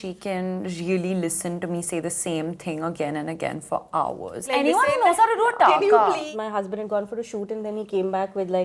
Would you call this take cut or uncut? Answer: cut